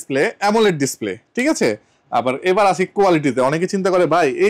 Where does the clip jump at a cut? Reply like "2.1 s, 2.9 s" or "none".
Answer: none